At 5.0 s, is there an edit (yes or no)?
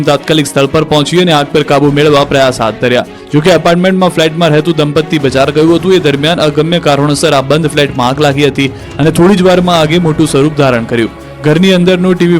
no